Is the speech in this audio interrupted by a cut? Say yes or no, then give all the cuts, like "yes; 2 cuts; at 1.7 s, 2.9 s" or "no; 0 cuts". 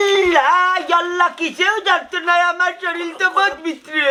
no; 0 cuts